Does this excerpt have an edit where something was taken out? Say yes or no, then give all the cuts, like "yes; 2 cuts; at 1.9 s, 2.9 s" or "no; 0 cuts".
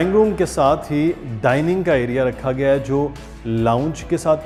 no; 0 cuts